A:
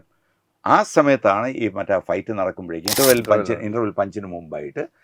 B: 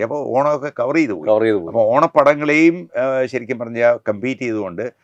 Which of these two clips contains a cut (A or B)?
A